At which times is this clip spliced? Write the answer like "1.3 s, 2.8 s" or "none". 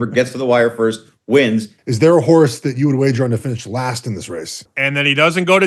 1.8 s, 4.7 s